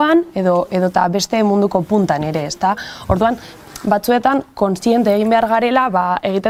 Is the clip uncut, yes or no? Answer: yes